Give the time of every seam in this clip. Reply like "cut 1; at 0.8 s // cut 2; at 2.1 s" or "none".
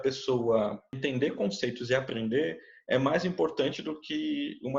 cut 1; at 1.0 s